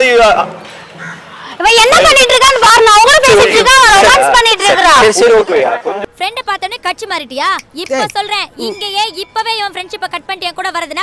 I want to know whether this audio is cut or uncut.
uncut